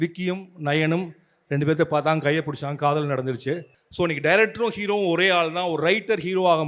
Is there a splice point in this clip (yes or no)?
yes